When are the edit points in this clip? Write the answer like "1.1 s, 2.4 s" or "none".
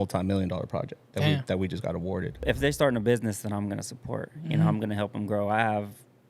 2.4 s